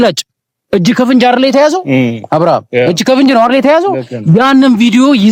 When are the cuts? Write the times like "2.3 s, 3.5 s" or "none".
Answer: none